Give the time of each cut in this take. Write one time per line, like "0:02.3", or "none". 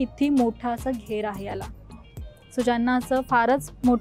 none

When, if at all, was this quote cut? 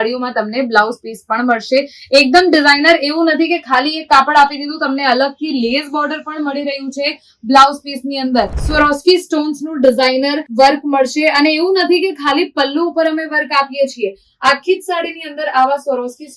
0:08.6

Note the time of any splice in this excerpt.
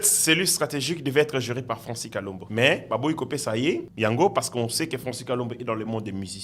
0:02.4
0:03.9

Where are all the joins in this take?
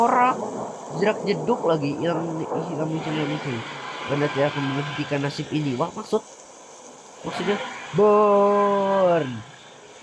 none

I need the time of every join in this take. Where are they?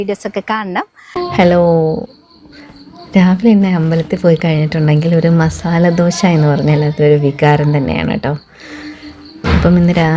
0:01.0

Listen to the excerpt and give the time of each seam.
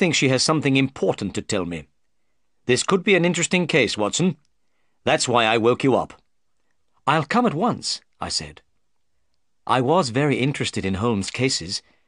0:08.8

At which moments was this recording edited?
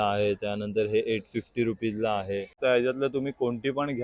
0:02.6

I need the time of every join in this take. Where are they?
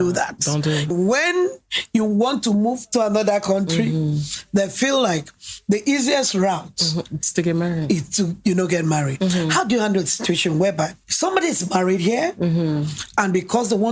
0:00.9
0:09.1
0:11.0

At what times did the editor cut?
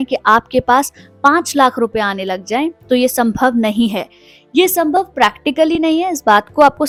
none

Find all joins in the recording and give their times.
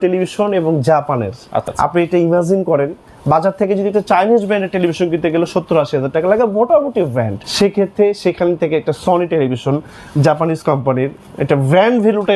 0:01.7
0:07.4

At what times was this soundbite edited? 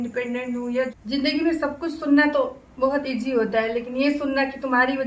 0:00.9

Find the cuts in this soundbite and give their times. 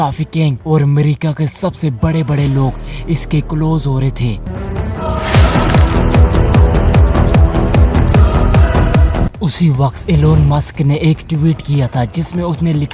none

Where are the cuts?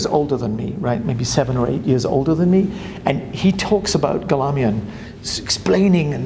none

